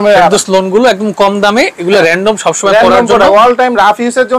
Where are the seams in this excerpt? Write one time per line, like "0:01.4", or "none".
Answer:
none